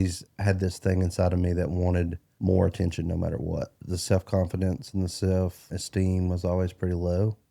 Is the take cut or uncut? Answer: cut